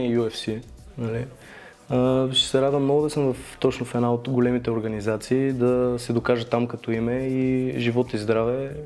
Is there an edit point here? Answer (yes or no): no